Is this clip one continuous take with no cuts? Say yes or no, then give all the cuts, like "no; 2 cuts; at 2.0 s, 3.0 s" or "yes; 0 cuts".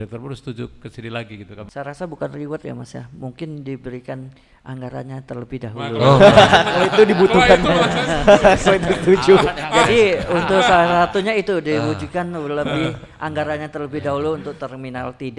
no; 1 cut; at 1.7 s